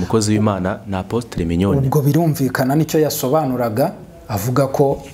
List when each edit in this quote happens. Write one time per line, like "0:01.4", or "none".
none